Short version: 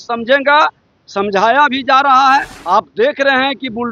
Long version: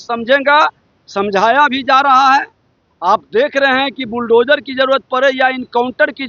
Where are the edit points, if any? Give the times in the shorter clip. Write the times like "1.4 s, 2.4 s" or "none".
2.6 s